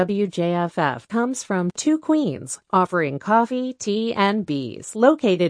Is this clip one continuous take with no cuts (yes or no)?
yes